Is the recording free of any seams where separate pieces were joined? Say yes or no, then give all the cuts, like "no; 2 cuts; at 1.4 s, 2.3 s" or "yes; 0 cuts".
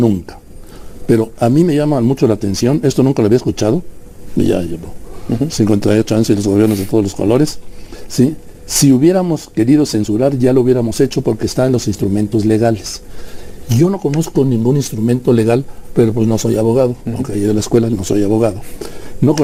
yes; 0 cuts